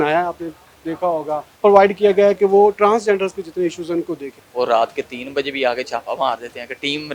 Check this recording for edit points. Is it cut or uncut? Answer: cut